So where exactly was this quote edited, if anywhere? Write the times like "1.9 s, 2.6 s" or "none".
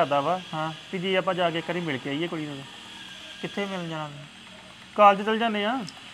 none